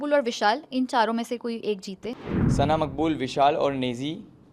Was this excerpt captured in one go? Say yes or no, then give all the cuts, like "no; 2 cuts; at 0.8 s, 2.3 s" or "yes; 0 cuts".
no; 1 cut; at 2.1 s